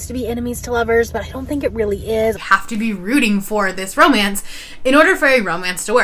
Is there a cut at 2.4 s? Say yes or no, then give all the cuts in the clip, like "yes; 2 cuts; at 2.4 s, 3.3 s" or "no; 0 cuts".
yes; 1 cut; at 2.4 s